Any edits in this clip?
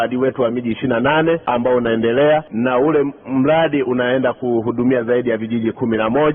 yes; 2 cuts; at 1.4 s, 2.5 s

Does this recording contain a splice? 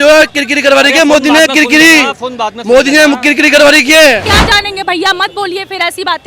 yes; 1 cut; at 4.3 s

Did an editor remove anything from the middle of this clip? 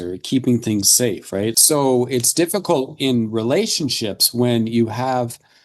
yes; 1 cut; at 1.6 s

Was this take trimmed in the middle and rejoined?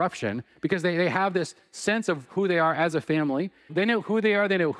yes; 1 cut; at 3.7 s

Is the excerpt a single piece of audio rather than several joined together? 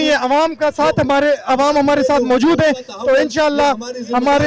yes; 0 cuts

